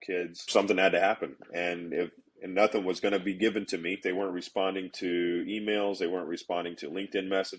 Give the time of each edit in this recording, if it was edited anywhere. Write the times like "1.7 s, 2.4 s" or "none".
4.0 s